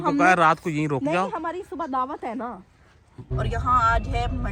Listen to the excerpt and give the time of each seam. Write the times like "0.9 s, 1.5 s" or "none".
3.3 s